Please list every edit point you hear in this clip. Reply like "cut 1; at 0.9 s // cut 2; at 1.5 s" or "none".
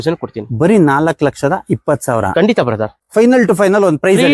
cut 1; at 3.0 s